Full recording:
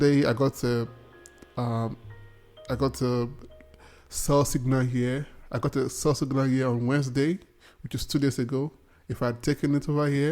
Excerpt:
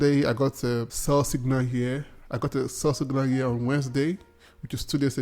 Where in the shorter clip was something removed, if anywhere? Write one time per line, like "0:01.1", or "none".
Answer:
0:00.9